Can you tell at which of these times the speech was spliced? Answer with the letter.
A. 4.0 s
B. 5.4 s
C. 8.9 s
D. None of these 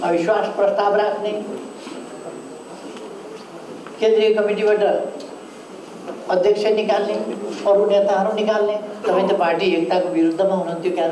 C